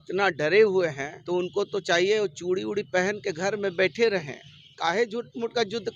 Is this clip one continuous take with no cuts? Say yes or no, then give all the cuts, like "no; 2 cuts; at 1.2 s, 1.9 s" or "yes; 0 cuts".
no; 1 cut; at 1.1 s